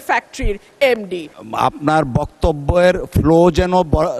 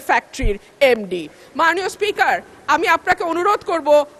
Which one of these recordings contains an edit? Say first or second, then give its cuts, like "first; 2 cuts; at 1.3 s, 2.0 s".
first; 1 cut; at 1.4 s